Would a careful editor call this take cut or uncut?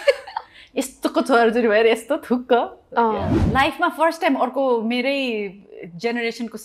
cut